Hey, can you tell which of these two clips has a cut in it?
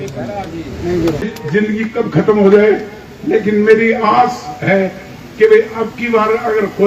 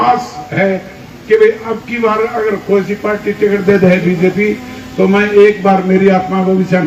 first; 1 cut; at 1.2 s

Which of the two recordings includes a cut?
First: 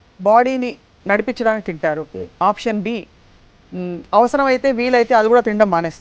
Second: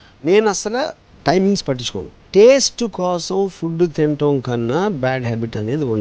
second; 1 cut; at 2.2 s

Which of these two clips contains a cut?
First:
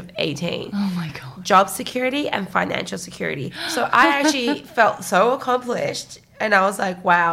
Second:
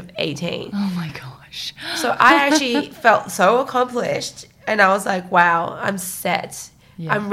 first; 2 cuts; at 1.3 s, 3.6 s

